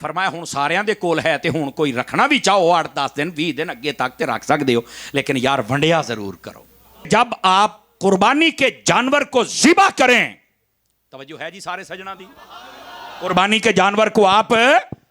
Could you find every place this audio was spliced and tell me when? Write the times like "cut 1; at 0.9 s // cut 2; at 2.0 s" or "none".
cut 1; at 7.1 s